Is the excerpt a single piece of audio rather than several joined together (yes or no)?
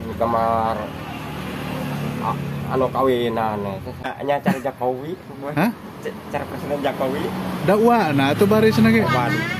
no